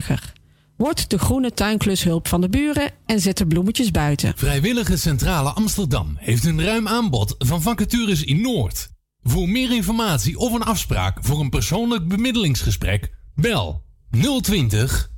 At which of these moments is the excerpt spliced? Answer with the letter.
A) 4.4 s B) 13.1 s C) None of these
A